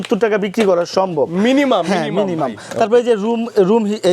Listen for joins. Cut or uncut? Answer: uncut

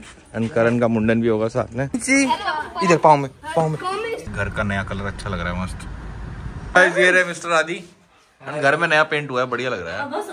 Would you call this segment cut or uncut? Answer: cut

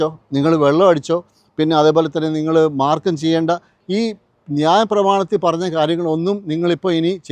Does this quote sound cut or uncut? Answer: uncut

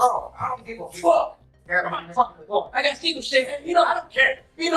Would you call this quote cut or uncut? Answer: cut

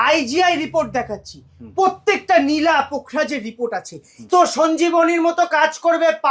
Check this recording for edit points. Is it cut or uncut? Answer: cut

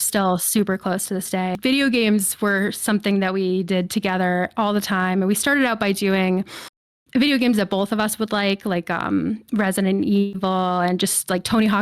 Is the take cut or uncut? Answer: cut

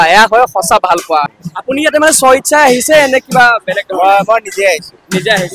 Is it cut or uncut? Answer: cut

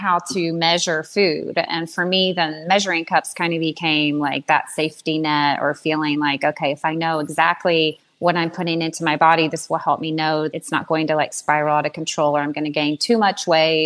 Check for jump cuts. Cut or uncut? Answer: cut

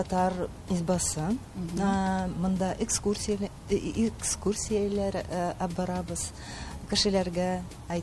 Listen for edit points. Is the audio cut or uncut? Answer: uncut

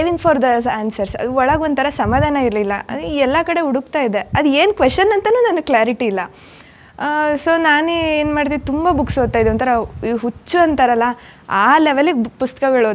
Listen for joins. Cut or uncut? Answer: uncut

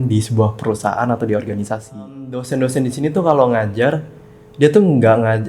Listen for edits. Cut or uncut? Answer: cut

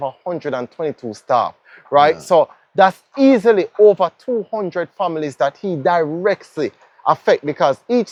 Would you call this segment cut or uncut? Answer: uncut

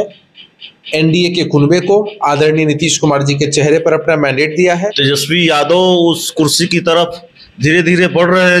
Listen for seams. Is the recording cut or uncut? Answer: cut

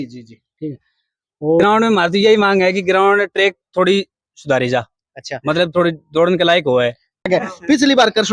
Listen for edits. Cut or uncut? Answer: cut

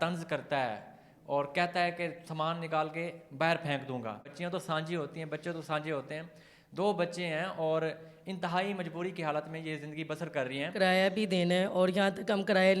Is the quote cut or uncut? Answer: cut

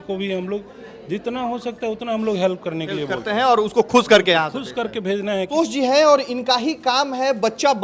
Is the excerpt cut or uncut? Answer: uncut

